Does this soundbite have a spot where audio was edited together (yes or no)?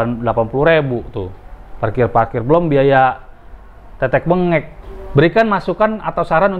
yes